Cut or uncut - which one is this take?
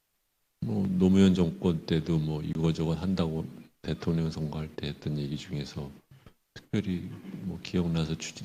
uncut